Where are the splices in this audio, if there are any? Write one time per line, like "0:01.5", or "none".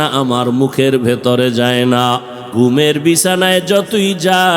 0:02.4